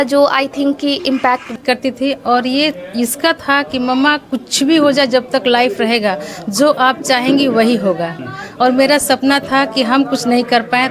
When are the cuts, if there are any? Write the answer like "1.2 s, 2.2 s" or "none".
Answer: 1.6 s